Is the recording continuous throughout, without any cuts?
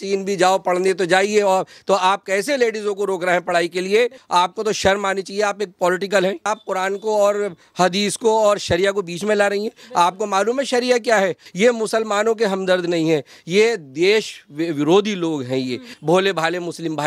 no; 4 cuts; at 4.2 s, 6.5 s, 11.4 s, 15.9 s

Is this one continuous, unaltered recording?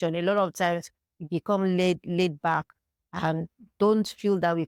yes; 0 cuts

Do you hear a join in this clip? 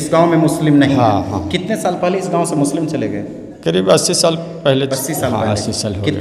no; 0 cuts

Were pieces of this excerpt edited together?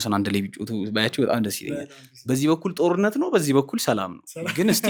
no; 0 cuts

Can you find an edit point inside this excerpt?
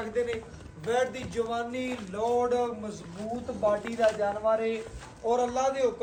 no; 0 cuts

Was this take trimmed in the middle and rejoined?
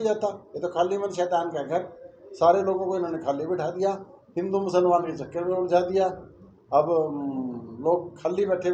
no; 0 cuts

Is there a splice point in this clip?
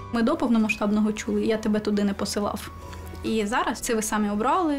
yes; 2 cuts; at 1.4 s, 3.8 s

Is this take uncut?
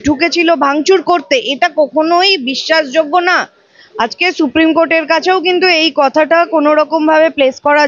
yes; 0 cuts

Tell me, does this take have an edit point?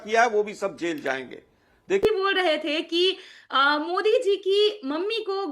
yes; 1 cut; at 2.0 s

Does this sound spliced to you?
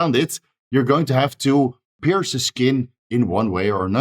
yes; 1 cut; at 2.0 s

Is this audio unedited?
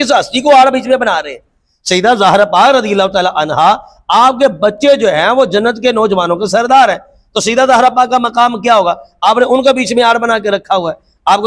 yes; 0 cuts

